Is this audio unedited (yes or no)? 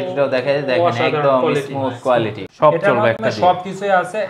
no